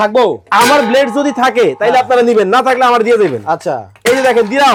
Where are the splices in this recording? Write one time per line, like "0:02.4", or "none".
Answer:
none

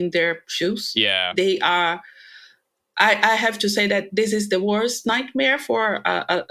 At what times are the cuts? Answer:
none

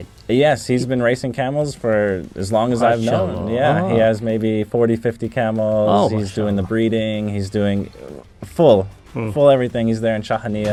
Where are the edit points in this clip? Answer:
none

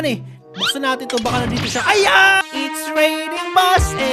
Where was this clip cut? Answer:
0:02.4

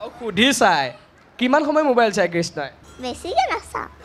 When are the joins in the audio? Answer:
0:02.8

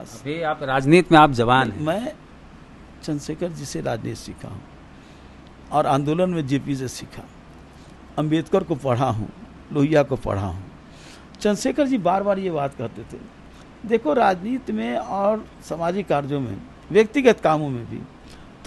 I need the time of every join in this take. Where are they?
none

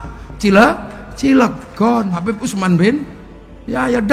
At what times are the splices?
0:02.3

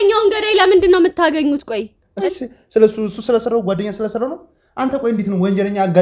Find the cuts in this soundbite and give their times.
0:02.2

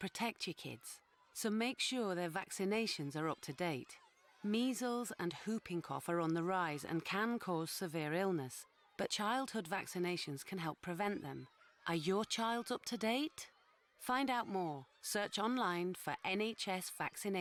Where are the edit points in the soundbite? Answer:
none

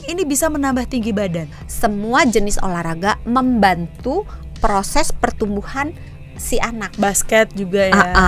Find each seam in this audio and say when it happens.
0:01.6

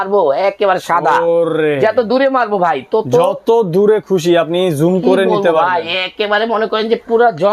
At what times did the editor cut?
none

